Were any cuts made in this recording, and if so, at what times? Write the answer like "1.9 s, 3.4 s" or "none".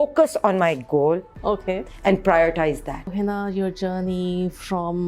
3.1 s